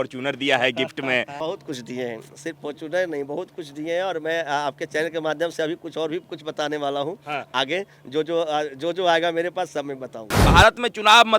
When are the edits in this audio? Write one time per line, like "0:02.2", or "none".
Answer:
0:01.4
0:10.4